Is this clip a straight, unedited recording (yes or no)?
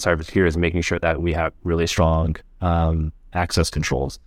yes